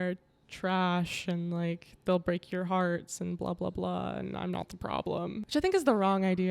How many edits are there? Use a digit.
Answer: 1